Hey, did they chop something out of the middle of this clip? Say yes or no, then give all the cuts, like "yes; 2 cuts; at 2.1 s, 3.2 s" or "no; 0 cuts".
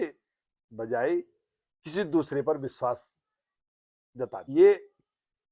yes; 1 cut; at 4.4 s